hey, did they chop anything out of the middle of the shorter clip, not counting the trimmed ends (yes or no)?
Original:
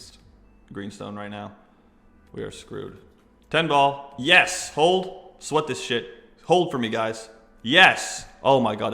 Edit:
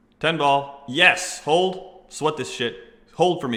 no